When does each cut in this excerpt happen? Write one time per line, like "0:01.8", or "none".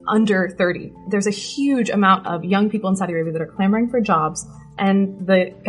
0:01.0
0:04.7